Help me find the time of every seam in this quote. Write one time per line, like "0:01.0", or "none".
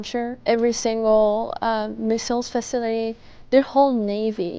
none